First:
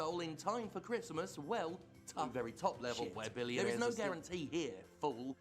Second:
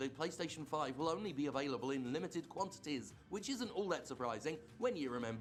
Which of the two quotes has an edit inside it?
first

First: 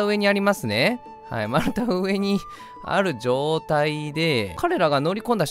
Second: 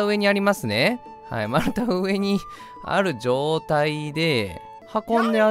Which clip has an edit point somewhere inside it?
first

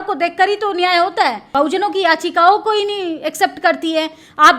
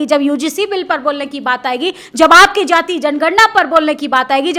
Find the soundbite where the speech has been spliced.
first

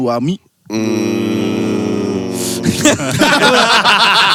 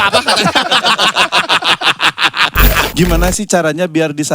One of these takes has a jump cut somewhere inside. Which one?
second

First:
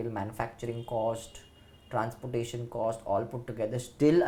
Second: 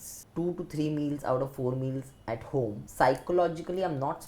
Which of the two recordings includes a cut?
second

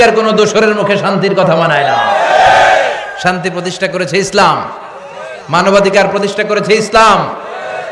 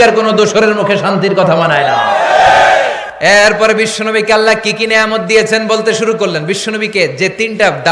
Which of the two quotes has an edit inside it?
second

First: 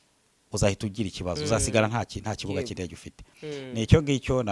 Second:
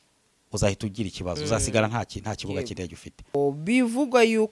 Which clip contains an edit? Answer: second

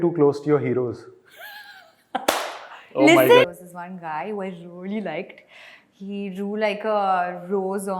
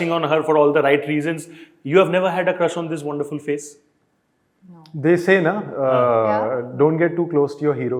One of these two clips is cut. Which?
first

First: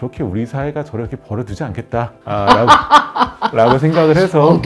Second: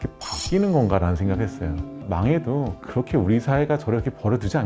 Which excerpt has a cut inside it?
second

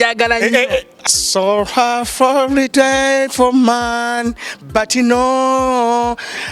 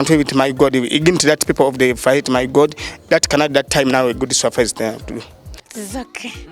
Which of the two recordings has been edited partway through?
first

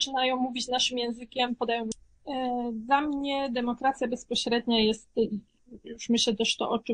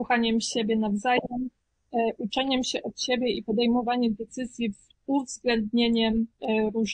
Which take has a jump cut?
first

